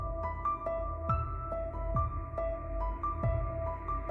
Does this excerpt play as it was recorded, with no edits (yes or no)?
yes